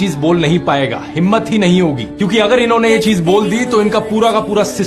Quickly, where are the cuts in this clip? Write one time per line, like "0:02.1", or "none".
0:02.1